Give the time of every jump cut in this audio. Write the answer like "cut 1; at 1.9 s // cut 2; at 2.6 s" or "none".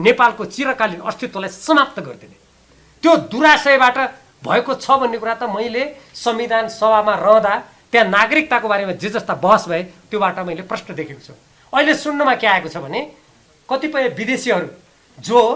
none